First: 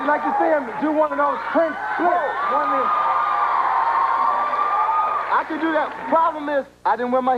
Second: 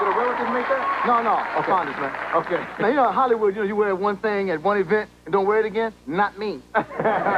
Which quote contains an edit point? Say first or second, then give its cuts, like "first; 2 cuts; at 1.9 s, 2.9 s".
second; 1 cut; at 5.1 s